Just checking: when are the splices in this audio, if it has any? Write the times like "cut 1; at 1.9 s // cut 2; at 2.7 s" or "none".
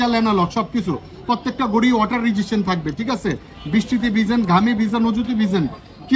none